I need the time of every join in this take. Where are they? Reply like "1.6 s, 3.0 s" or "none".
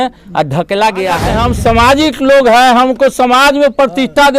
1.3 s